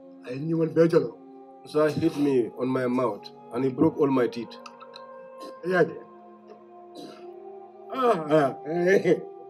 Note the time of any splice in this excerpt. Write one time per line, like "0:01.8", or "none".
none